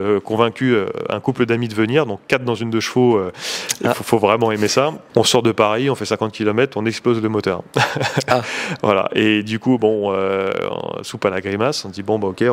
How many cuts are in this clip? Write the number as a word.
one